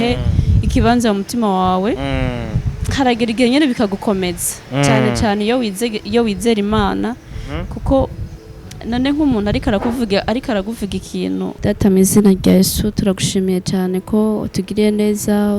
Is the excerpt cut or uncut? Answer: cut